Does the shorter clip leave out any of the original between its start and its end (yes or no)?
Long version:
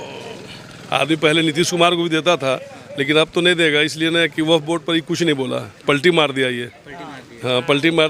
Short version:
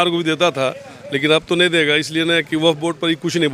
no